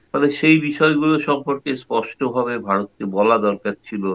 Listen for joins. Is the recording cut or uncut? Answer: uncut